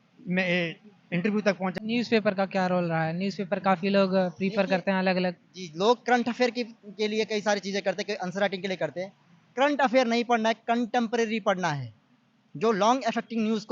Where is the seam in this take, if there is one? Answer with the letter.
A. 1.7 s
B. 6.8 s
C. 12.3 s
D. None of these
A